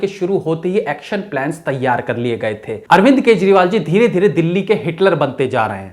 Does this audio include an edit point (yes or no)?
yes